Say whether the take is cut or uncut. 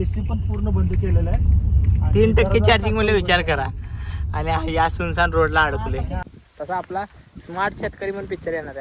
cut